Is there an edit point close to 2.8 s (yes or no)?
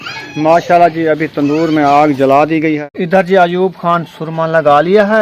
yes